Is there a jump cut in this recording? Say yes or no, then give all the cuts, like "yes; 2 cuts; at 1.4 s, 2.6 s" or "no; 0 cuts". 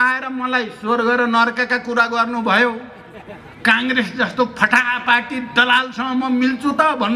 no; 0 cuts